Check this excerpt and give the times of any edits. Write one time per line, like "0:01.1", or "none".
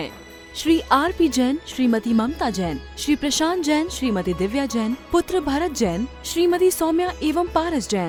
none